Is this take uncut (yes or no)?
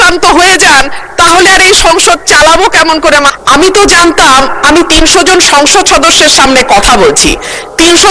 no